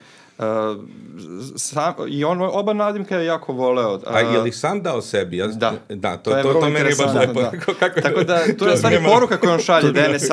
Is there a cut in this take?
no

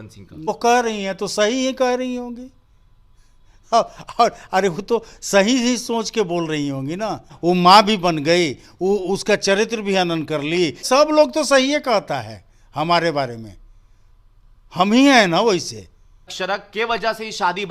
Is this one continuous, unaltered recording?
no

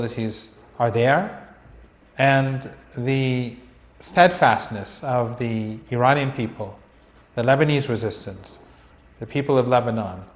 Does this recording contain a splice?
no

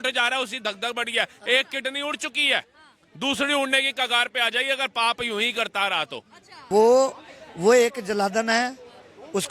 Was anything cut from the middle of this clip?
yes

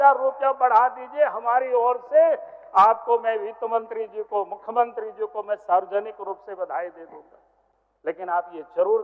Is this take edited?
no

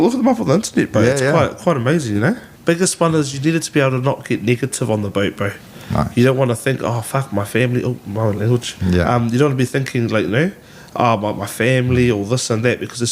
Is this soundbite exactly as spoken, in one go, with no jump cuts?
no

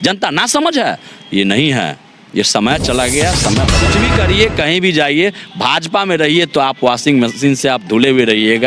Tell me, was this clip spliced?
yes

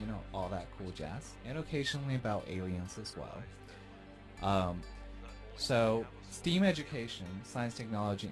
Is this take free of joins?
yes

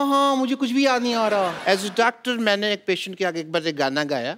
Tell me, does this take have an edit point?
yes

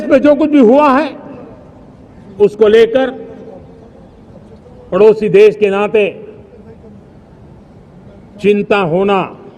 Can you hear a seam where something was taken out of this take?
no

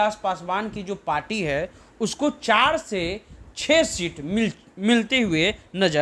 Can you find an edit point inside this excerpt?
no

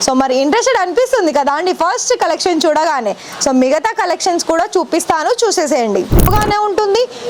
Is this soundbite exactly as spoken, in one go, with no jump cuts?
no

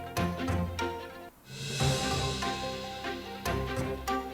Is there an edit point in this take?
yes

